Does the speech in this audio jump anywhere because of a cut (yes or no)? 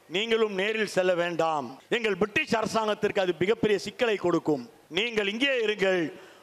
yes